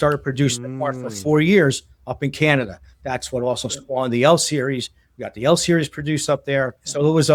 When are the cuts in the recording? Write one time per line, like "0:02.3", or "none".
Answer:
none